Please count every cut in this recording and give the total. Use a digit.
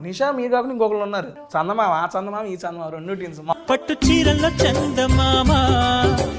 2